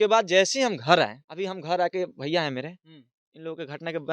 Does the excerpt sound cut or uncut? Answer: cut